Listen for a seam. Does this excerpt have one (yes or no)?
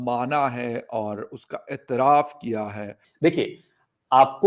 yes